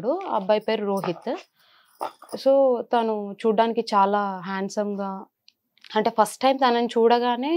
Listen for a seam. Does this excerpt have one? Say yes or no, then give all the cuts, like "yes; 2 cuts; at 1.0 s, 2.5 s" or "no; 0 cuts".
no; 0 cuts